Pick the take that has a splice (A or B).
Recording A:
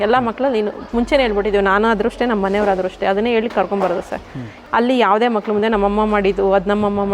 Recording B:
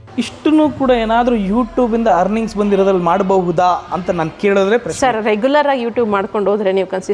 A